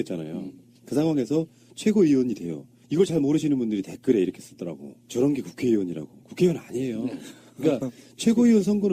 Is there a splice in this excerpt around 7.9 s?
yes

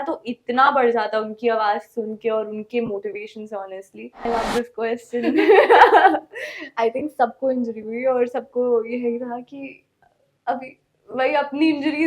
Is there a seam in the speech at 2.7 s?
no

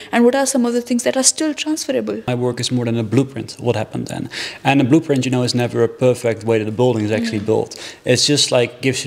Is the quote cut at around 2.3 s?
yes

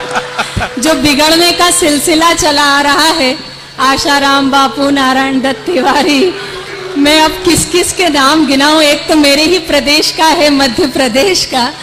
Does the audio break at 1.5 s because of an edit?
no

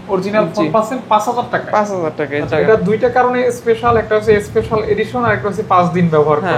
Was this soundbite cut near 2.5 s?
yes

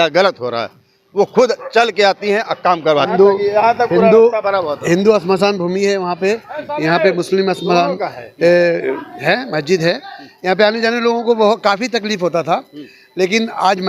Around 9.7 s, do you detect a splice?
no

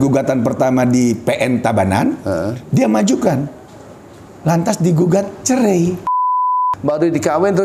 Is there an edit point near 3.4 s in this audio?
no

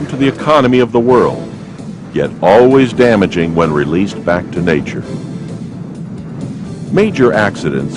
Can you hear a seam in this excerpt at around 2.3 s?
no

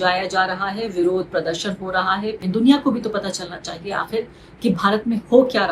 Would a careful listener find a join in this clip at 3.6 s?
no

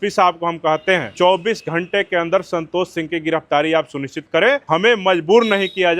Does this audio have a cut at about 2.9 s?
no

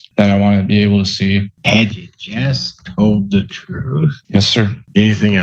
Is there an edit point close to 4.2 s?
yes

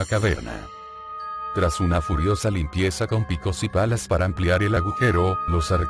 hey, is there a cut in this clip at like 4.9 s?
no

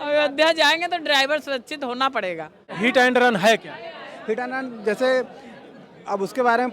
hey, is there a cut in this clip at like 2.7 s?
yes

